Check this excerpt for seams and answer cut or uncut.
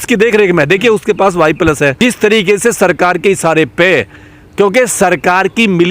cut